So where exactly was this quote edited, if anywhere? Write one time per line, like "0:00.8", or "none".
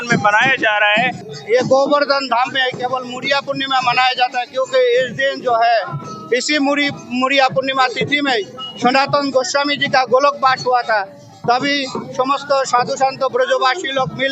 0:01.2